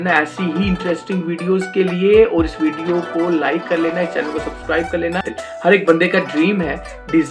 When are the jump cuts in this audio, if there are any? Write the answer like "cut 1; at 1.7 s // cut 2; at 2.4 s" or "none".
cut 1; at 5.4 s